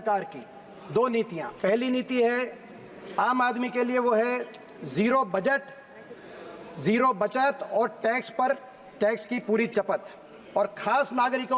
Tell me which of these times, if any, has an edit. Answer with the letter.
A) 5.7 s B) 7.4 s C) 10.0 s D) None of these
D